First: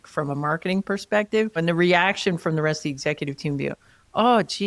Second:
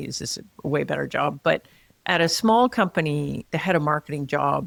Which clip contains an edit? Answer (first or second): first